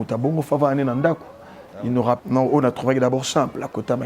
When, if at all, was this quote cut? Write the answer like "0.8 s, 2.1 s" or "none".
2.2 s